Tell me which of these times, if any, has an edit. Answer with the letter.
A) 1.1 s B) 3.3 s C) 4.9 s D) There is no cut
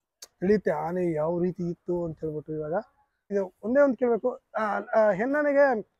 B